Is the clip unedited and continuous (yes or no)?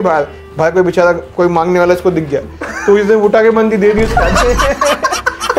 yes